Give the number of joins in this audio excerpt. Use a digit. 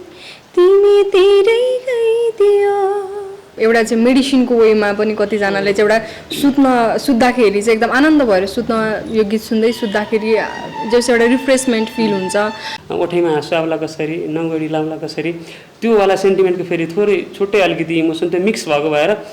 2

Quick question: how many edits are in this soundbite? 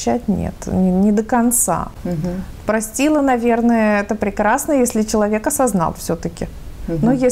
0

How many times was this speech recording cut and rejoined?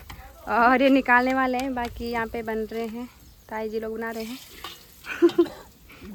0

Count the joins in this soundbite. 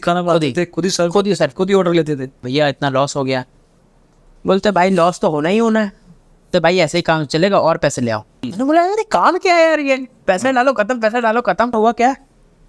4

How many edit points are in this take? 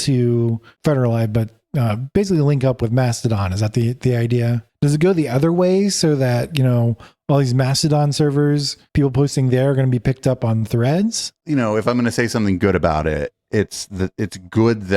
2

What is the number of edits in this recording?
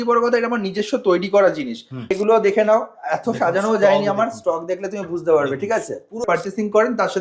2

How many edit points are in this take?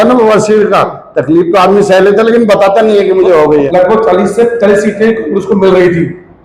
1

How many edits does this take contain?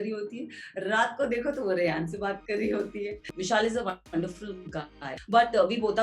2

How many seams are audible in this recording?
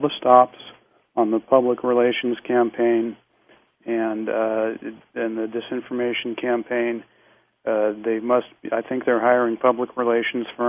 1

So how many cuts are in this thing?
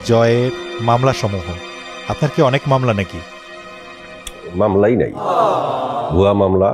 0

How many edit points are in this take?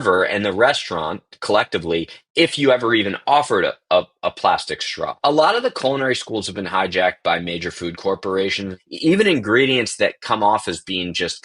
2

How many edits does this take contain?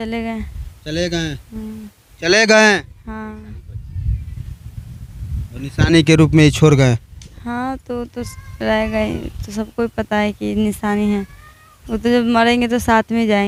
0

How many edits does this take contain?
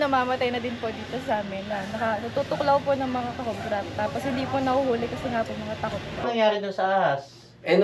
1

